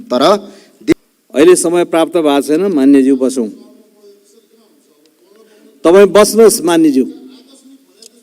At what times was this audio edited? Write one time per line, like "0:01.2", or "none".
0:00.9